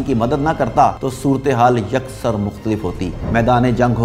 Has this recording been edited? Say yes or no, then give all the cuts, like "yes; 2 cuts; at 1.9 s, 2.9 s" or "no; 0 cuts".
yes; 2 cuts; at 1.1 s, 3.1 s